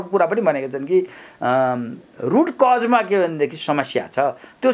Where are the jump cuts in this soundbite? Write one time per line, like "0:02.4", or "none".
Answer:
none